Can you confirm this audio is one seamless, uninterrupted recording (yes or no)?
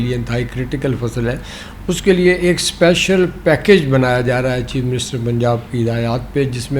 yes